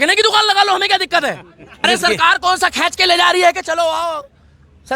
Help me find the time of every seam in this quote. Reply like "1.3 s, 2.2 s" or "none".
1.8 s